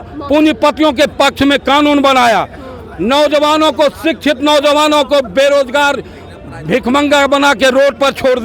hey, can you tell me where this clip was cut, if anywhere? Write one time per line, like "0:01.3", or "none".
none